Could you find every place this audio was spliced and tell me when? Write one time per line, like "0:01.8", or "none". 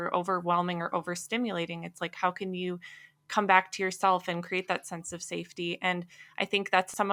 none